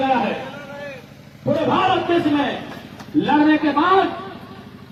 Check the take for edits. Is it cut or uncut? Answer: uncut